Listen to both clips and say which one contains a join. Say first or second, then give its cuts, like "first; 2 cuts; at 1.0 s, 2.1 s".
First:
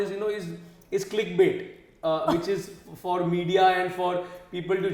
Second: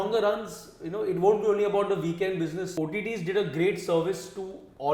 second; 1 cut; at 2.7 s